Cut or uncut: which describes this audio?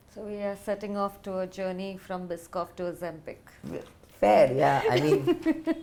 uncut